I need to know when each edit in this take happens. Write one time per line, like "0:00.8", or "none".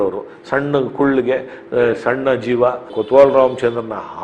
0:02.9